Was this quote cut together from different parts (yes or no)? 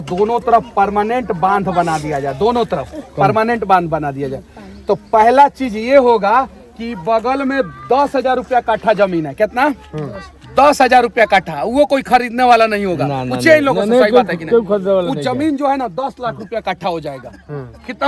no